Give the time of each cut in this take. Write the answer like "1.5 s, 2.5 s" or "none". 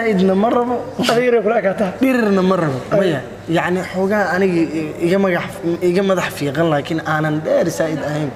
none